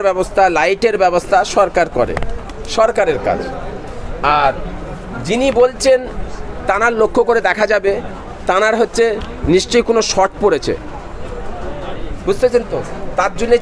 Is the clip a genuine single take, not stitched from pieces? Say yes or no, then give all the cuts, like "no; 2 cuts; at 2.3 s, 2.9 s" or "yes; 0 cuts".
yes; 0 cuts